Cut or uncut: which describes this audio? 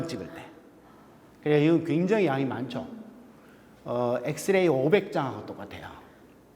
uncut